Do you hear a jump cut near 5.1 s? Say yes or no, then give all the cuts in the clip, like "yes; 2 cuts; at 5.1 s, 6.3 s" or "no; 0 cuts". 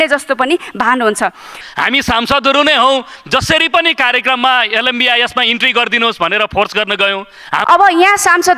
no; 2 cuts; at 1.5 s, 7.5 s